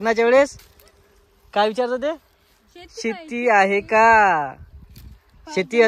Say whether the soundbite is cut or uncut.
uncut